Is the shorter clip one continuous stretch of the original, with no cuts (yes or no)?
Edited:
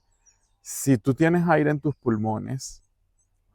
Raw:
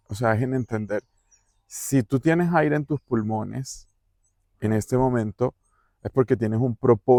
yes